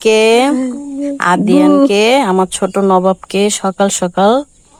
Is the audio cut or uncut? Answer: uncut